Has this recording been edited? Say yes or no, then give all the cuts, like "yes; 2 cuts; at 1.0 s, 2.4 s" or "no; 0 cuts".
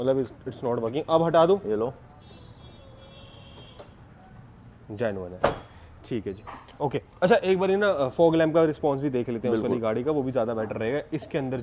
no; 0 cuts